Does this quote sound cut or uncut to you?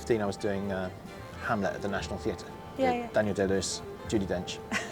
cut